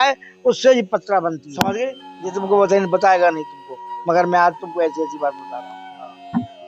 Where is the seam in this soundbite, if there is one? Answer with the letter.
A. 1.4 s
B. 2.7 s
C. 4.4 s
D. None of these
A